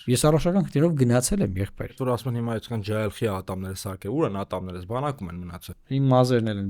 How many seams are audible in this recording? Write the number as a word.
one